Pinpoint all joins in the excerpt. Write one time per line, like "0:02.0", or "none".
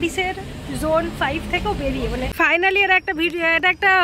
0:02.3